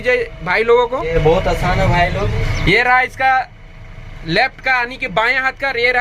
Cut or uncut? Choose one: cut